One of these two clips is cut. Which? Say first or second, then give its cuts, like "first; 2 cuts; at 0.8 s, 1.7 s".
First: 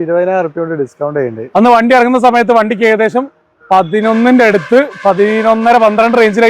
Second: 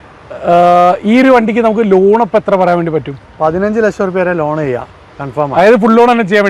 first; 1 cut; at 1.4 s